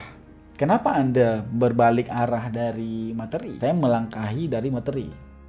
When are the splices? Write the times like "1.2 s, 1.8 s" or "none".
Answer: 3.5 s